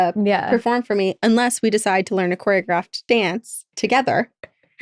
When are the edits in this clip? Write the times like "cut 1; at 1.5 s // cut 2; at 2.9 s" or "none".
cut 1; at 3.2 s